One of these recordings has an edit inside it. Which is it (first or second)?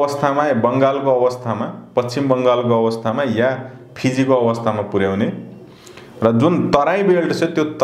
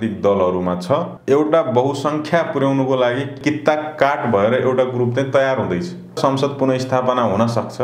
second